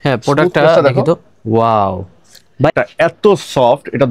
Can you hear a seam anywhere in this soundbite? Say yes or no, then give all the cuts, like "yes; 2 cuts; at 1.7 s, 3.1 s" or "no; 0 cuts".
yes; 1 cut; at 2.7 s